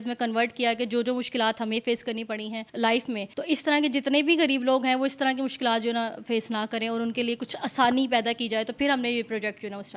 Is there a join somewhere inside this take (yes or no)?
yes